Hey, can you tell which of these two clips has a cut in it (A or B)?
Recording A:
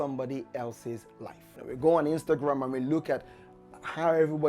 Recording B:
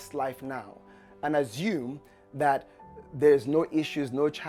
A